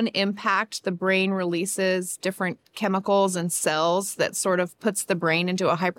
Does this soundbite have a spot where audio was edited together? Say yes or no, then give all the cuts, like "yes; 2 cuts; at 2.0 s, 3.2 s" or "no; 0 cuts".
no; 0 cuts